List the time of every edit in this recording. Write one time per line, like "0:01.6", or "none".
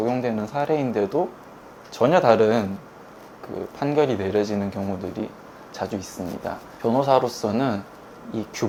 none